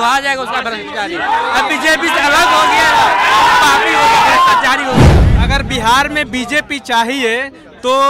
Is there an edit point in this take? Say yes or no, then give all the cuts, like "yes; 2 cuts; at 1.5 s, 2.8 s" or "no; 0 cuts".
yes; 1 cut; at 5.2 s